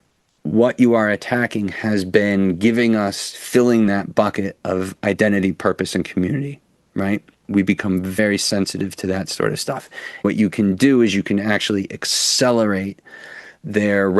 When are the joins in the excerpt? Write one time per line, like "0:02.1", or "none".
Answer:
0:08.2
0:10.2